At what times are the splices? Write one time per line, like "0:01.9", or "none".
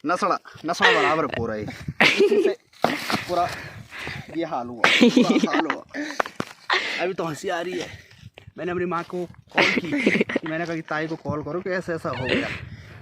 none